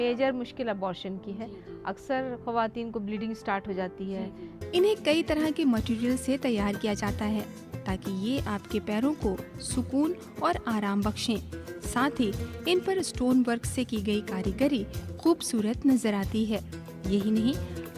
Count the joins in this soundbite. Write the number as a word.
one